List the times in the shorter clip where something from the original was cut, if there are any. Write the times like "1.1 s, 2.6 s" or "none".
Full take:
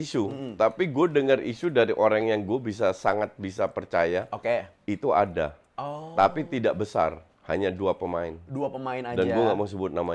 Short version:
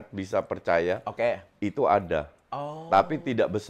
none